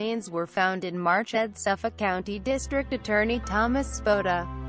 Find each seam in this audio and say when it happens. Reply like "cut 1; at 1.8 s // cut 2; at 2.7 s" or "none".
none